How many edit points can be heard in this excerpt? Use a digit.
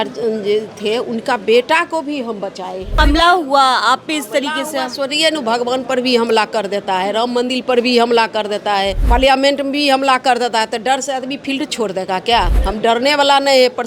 3